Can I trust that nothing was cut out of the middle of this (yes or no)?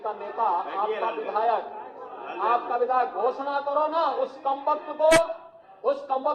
yes